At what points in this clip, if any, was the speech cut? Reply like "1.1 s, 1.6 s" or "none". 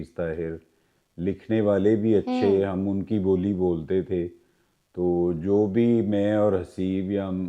none

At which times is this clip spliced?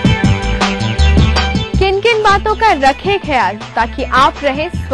1.1 s

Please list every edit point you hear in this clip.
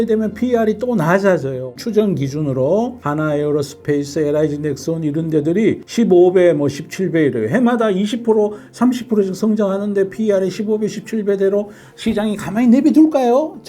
1.7 s

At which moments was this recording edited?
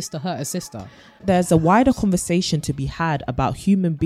1.2 s

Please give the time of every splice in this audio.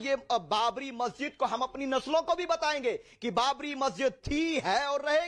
none

